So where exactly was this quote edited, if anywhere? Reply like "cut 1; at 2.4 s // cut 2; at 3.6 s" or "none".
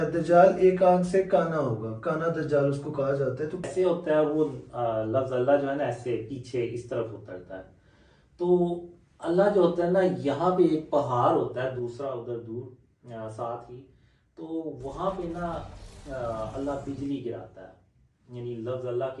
cut 1; at 3.7 s